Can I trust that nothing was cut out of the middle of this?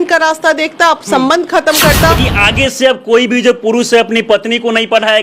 no; 1 cut; at 2.2 s

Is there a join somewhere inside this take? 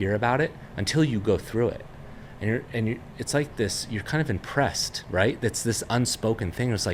no; 0 cuts

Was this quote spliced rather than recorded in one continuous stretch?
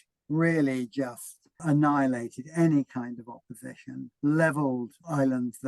yes; 2 cuts; at 1.6 s, 4.0 s

